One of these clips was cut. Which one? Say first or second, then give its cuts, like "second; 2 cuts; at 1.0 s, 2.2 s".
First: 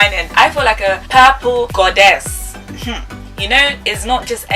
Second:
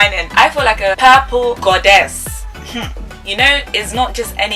second; 1 cut; at 1.0 s